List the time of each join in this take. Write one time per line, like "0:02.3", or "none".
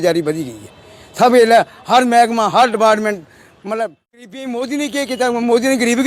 0:04.5

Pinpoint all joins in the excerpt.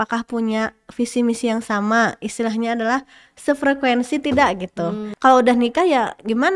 0:05.1

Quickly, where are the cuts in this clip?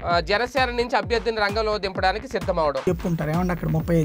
0:02.9

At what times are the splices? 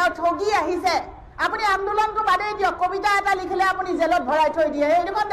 0:01.2

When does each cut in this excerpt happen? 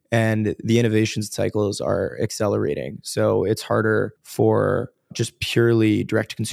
0:04.2
0:05.3

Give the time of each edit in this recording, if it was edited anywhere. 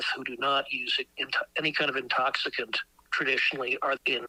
none

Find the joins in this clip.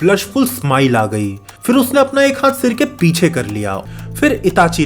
0:03.8

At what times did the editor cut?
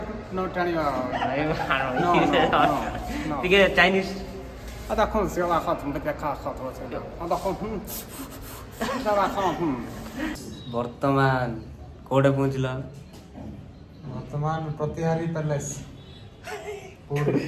0:01.4
0:10.1
0:16.3

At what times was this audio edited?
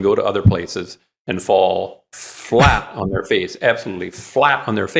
none

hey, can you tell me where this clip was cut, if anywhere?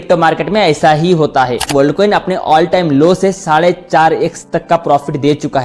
0:01.7

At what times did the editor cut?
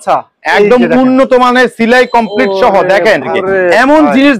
0:03.2

